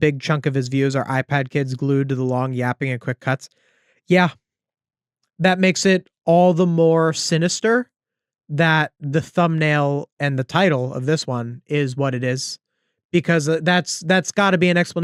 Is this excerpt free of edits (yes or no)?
yes